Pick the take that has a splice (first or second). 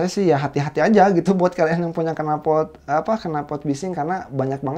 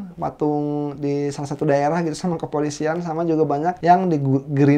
second